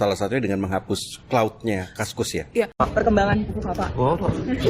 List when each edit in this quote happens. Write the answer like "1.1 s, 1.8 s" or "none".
2.8 s